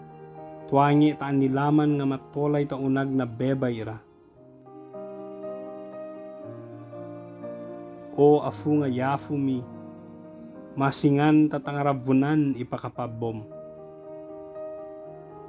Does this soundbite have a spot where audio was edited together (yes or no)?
yes